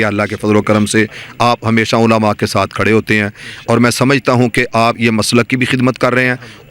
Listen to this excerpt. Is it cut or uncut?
uncut